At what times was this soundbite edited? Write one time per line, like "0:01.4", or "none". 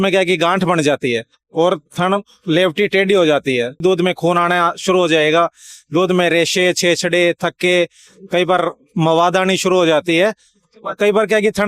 0:03.8